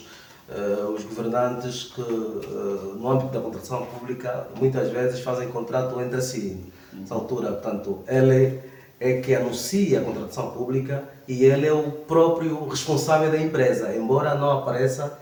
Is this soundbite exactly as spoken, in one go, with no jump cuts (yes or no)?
yes